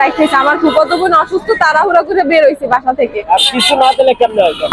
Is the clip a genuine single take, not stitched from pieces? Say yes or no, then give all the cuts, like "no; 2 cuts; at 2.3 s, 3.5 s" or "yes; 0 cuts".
yes; 0 cuts